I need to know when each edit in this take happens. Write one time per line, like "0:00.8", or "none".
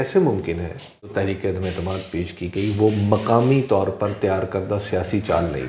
0:01.1